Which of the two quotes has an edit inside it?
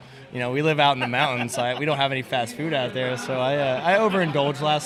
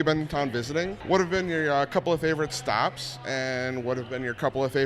second; 1 cut; at 1.0 s

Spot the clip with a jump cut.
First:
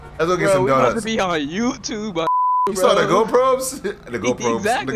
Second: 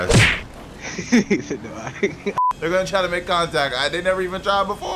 second; 1 cut; at 2.4 s

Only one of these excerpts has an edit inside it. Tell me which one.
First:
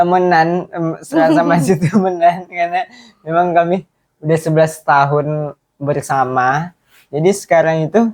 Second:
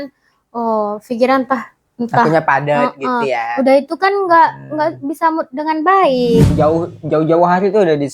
second; 1 cut; at 6.5 s

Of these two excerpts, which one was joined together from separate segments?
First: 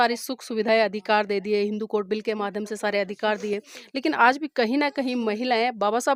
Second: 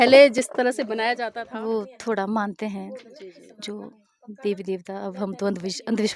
second; 1 cut; at 1.1 s

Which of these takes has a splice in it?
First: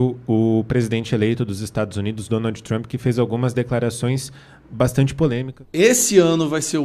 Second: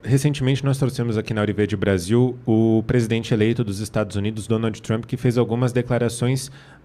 first; 1 cut; at 5.8 s

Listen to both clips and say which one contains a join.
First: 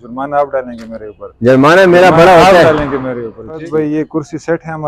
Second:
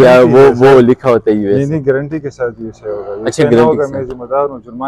first; 1 cut; at 3.6 s

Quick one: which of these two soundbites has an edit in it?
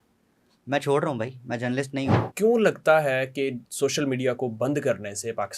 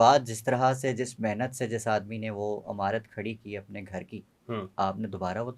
first; 2 cuts; at 2.2 s, 3.6 s

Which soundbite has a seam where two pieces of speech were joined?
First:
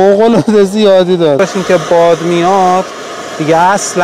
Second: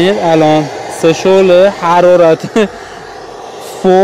first; 1 cut; at 1.4 s

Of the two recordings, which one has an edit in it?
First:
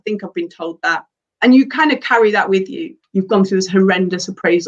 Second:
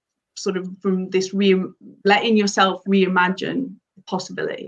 first; 1 cut; at 3.0 s

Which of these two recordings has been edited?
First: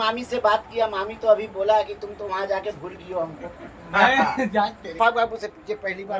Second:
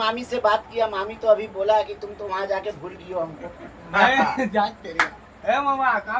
first; 1 cut; at 5.0 s

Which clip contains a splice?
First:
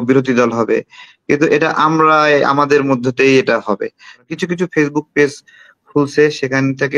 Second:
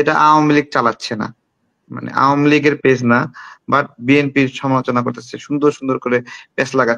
first; 1 cut; at 4.3 s

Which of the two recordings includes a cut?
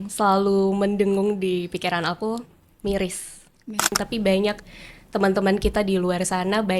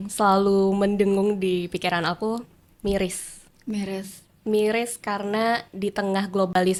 first; 1 cut; at 3.9 s

